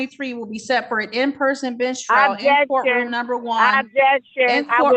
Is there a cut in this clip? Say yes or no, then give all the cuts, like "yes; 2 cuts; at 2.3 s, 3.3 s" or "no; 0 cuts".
no; 0 cuts